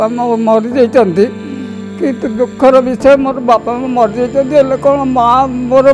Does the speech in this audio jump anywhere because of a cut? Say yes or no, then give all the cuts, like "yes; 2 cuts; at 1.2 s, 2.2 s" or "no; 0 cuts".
no; 0 cuts